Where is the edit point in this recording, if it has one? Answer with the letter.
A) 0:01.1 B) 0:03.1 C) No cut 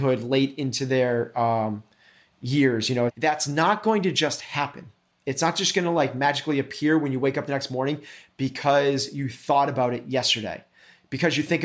B